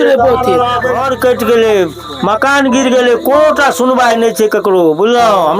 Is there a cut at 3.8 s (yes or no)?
no